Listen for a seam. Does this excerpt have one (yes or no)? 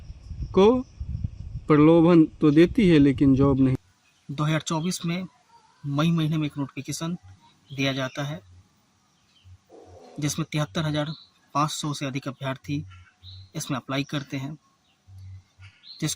yes